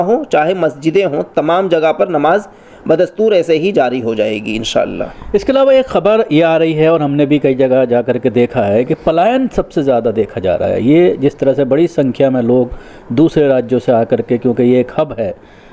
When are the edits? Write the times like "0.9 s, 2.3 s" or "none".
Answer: none